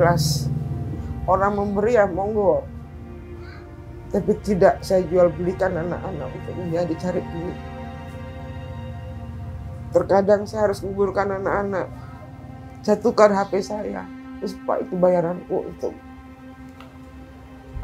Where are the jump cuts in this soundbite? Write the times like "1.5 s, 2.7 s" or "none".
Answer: none